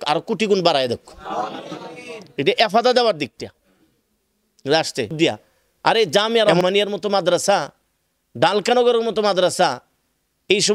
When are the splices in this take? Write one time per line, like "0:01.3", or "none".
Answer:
0:05.1